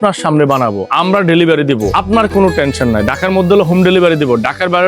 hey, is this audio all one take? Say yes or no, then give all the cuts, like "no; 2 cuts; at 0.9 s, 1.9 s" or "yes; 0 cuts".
no; 2 cuts; at 0.8 s, 1.9 s